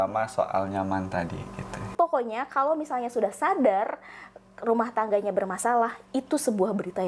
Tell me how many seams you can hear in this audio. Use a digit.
1